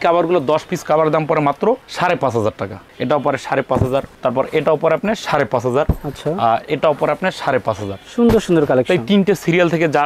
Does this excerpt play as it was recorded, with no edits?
yes; 0 cuts

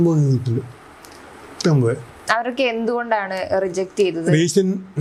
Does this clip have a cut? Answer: no; 0 cuts

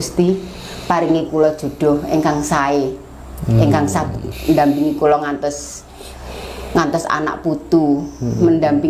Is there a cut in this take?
no; 0 cuts

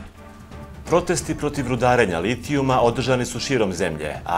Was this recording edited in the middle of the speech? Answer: yes; 1 cut; at 0.9 s

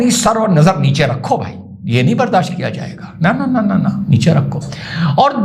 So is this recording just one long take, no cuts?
yes; 0 cuts

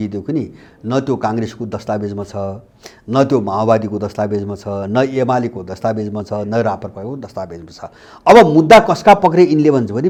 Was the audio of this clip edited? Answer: no; 0 cuts

